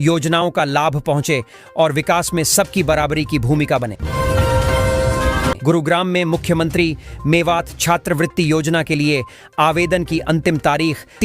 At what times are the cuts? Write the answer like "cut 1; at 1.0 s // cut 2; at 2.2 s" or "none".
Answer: cut 1; at 4.0 s // cut 2; at 5.6 s